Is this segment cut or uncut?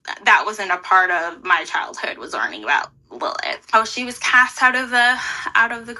cut